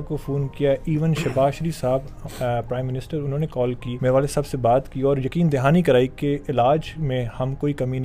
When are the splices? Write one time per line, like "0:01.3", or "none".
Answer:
0:03.9